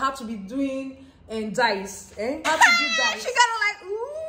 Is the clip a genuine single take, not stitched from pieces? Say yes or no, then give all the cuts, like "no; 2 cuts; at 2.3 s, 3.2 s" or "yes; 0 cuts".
no; 1 cut; at 2.5 s